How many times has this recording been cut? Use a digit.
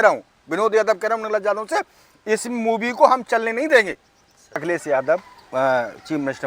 1